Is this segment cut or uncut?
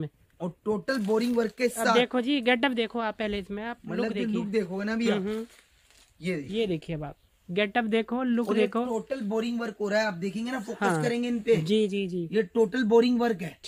uncut